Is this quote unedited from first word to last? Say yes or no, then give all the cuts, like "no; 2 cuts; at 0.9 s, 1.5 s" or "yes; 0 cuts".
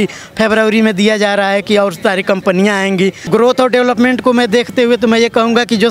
no; 1 cut; at 3.2 s